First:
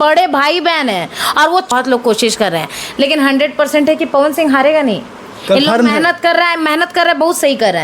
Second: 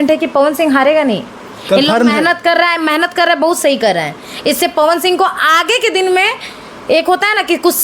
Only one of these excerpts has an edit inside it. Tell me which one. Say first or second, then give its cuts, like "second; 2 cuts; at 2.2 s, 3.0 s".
first; 1 cut; at 1.7 s